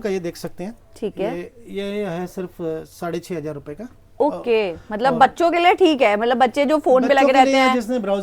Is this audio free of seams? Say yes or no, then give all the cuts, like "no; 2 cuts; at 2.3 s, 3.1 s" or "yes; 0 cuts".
yes; 0 cuts